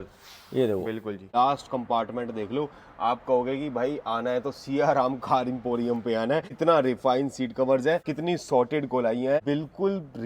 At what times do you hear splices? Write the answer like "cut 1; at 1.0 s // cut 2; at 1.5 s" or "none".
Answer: cut 1; at 1.3 s // cut 2; at 6.5 s // cut 3; at 8.1 s // cut 4; at 9.4 s